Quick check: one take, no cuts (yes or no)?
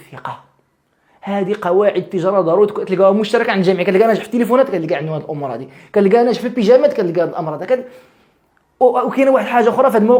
yes